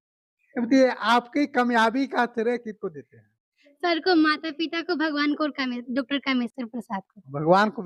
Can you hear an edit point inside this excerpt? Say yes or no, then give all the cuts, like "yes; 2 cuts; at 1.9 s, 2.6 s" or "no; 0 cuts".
no; 0 cuts